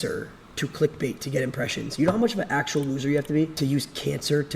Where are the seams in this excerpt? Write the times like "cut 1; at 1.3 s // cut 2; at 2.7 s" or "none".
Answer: cut 1; at 3.5 s